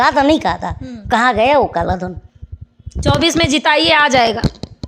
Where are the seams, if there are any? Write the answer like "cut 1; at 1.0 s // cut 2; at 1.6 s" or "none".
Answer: none